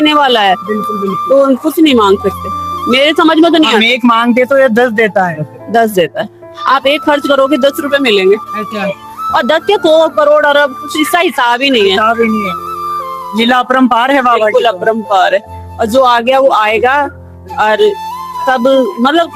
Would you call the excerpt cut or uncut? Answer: uncut